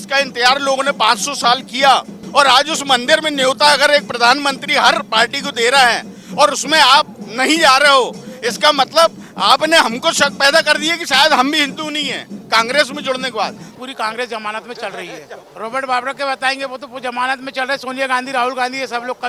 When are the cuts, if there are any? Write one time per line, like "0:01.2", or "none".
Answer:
0:02.2
0:13.8
0:15.4